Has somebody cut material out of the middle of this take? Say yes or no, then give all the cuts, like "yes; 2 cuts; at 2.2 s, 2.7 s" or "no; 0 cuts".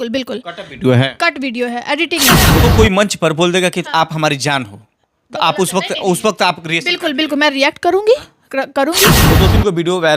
yes; 2 cuts; at 2.5 s, 9.3 s